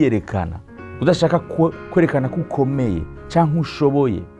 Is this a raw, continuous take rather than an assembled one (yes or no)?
yes